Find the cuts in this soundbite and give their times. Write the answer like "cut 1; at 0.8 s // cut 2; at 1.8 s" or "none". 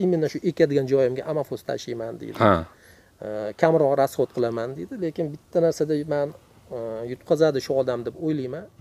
none